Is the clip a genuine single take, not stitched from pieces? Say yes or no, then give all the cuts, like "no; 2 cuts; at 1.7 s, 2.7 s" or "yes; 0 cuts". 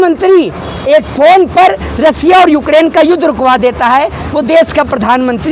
yes; 0 cuts